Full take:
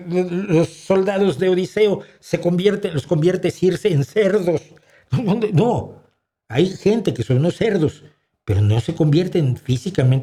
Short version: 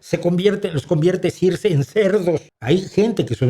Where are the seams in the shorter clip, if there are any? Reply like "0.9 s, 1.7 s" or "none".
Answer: 2.5 s